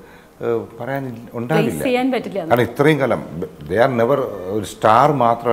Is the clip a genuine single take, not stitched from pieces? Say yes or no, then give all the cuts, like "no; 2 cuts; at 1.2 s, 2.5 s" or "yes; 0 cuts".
yes; 0 cuts